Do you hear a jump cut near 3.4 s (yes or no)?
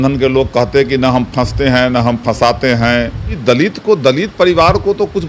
yes